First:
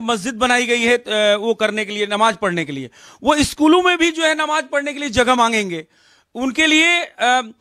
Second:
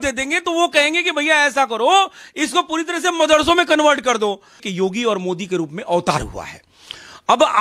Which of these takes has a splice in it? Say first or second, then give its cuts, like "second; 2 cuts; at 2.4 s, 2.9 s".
second; 1 cut; at 4.6 s